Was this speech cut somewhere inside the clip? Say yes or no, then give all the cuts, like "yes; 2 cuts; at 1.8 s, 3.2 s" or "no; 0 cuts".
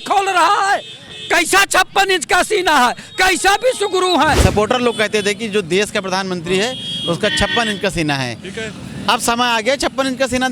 yes; 1 cut; at 4.4 s